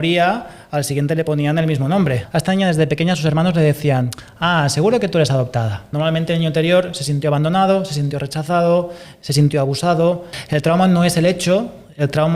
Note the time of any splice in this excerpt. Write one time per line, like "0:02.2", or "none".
0:02.2
0:05.9
0:10.3